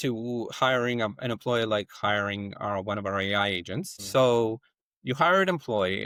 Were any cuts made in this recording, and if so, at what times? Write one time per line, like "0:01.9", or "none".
none

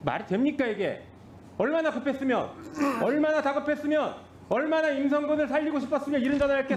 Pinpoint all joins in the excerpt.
none

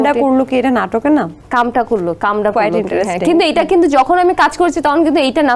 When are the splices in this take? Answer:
0:01.4

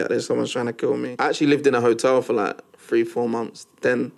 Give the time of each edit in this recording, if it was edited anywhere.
0:01.1

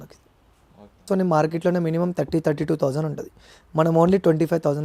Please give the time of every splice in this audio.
0:01.1

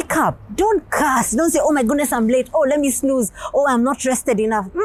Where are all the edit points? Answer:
none

